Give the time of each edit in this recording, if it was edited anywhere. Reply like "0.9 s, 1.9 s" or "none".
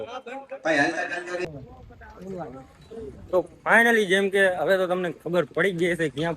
1.4 s